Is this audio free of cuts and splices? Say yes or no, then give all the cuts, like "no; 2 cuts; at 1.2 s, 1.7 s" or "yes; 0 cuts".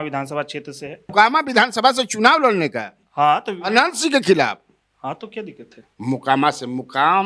no; 2 cuts; at 1.1 s, 5.8 s